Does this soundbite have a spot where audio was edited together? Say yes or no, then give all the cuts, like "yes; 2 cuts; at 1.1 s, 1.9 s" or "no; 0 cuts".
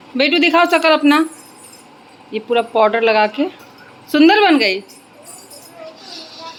no; 0 cuts